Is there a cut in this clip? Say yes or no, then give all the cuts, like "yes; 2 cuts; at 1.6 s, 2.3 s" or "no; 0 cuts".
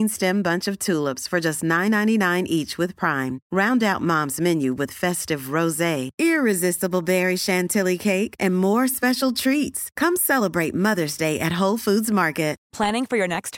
no; 0 cuts